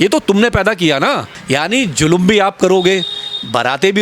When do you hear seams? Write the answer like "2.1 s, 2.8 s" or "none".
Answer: 1.3 s